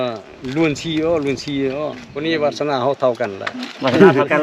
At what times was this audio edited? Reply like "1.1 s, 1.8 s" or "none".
2.1 s